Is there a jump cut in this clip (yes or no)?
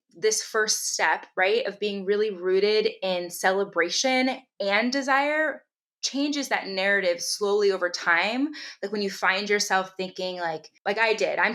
no